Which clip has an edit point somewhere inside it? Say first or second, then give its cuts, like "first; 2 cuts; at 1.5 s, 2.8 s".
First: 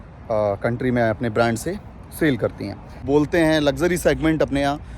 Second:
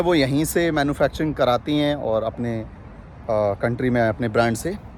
first; 1 cut; at 3.0 s